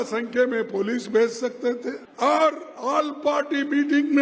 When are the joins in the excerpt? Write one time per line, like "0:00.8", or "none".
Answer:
0:02.0